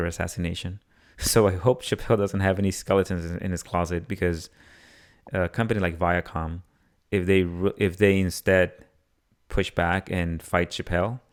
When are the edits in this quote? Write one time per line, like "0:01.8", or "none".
none

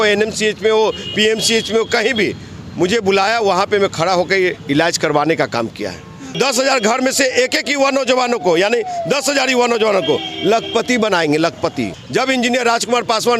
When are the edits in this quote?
0:06.4
0:11.9

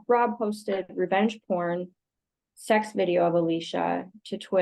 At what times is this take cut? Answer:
none

